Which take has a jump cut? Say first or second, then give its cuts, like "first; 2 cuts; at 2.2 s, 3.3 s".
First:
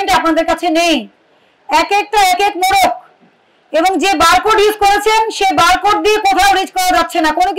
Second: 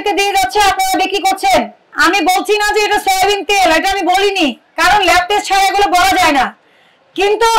second; 1 cut; at 1.8 s